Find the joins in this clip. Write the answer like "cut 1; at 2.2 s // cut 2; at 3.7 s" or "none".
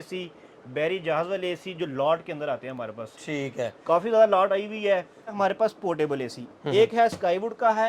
cut 1; at 5.4 s